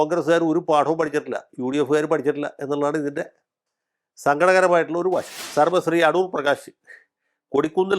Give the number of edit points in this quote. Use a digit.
1